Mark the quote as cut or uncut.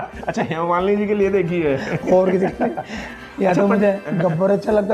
uncut